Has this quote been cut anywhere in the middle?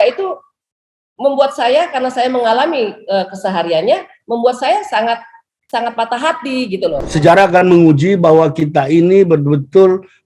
yes; 1 cut; at 7.1 s

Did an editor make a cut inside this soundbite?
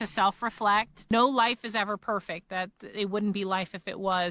yes; 1 cut; at 1.1 s

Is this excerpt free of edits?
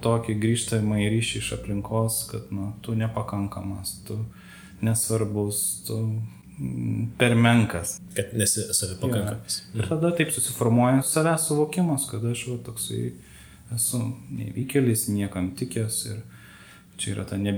no; 1 cut; at 11.1 s

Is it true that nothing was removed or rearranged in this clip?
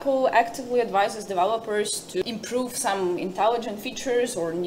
no; 1 cut; at 2.2 s

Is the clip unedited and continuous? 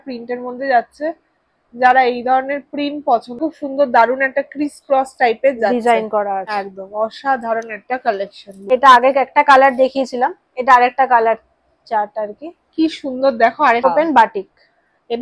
no; 3 cuts; at 3.4 s, 8.7 s, 13.8 s

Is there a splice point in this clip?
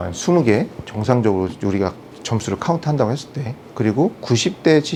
no; 0 cuts

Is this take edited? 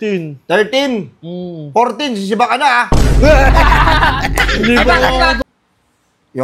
yes; 1 cut; at 5.4 s

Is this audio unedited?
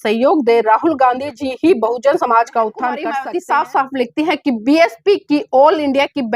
no; 1 cut; at 3.1 s

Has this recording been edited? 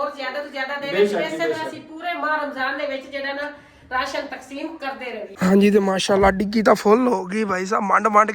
yes; 1 cut; at 5.3 s

